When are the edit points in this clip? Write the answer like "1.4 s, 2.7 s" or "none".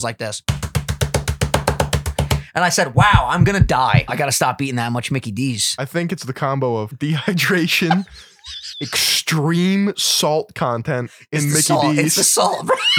4.1 s, 5.7 s, 6.9 s